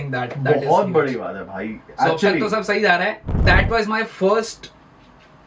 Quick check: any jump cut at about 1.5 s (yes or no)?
no